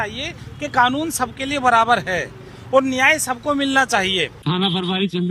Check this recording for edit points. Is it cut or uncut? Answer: cut